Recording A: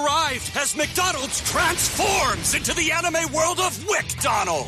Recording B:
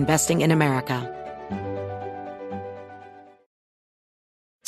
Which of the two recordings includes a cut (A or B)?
B